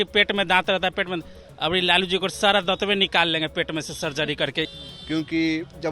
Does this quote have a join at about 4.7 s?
yes; 1 cut; at 4.7 s

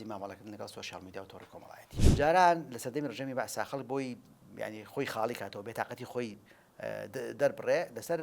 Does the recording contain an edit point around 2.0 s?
yes; 1 cut; at 2.0 s

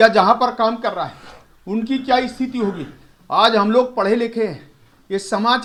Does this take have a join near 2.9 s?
no; 0 cuts

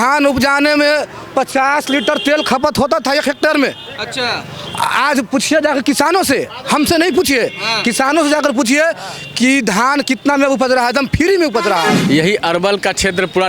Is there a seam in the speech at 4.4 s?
no; 1 cut; at 12.0 s

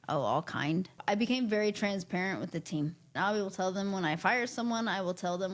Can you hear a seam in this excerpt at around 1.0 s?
yes; 2 cuts; at 1.0 s, 3.1 s

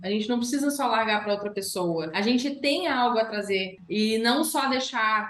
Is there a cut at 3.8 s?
yes; 2 cuts; at 2.1 s, 3.8 s

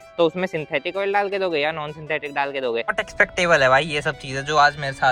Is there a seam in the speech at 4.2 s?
no; 1 cut; at 2.9 s

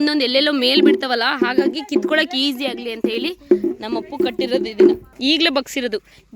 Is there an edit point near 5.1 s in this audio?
yes; 1 cut; at 5.1 s

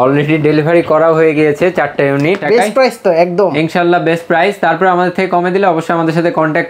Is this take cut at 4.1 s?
no; 1 cut; at 2.4 s

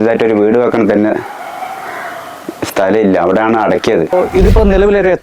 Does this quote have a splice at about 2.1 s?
no; 1 cut; at 4.1 s

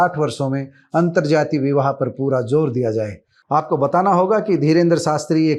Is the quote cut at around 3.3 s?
yes; 1 cut; at 3.3 s

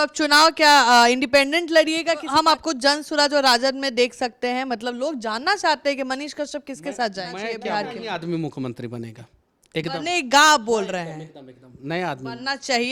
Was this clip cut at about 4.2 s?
no; 2 cuts; at 2.2 s, 7.5 s

